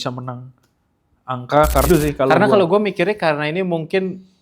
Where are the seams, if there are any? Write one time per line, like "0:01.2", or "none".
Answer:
0:01.9